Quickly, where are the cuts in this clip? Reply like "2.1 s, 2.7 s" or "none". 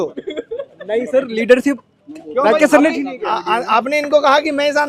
none